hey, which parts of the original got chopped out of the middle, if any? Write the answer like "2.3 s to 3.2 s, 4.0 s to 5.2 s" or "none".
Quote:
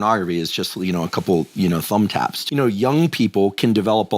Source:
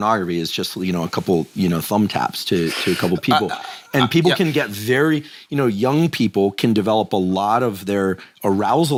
2.3 s to 5.4 s